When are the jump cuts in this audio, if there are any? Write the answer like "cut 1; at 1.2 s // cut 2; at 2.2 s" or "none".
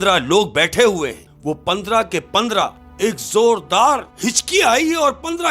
cut 1; at 1.3 s // cut 2; at 2.8 s // cut 3; at 4.1 s